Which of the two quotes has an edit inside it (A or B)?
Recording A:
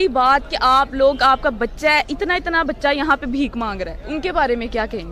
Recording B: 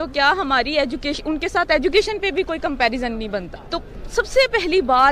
B